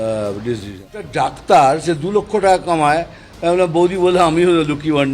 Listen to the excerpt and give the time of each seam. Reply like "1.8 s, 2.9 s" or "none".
1.1 s